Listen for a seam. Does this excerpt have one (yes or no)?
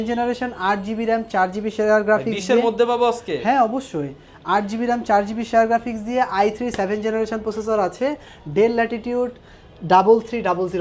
no